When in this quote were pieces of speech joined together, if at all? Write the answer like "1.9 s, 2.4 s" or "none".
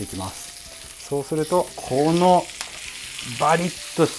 1.8 s